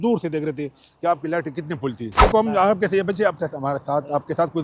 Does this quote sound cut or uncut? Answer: cut